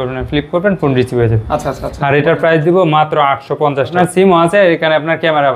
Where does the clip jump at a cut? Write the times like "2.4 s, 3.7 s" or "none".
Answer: 3.9 s